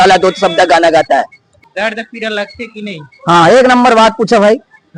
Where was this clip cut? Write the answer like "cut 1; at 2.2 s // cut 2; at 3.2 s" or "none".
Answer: cut 1; at 1.4 s

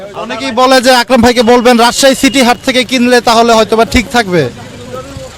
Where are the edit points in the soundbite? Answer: none

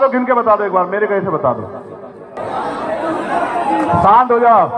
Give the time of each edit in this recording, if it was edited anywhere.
cut 1; at 2.4 s

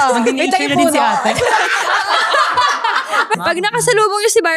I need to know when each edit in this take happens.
cut 1; at 3.4 s

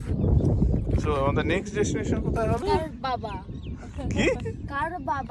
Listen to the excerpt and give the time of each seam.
cut 1; at 2.6 s

